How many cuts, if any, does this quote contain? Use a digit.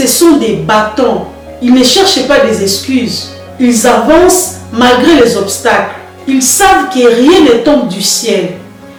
0